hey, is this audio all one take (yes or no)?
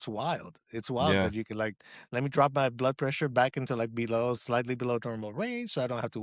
yes